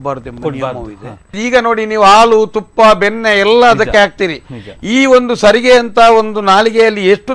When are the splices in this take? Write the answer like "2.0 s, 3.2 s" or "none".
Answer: 1.4 s